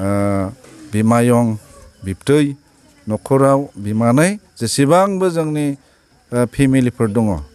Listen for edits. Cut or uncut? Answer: uncut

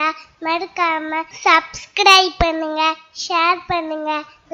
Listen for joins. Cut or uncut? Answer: cut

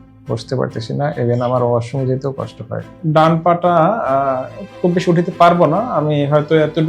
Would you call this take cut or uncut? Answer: cut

